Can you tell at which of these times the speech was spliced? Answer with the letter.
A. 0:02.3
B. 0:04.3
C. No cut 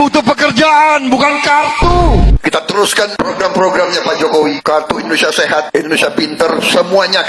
A